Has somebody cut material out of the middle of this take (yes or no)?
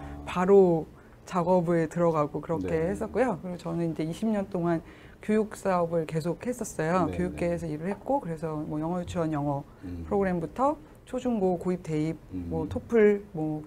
no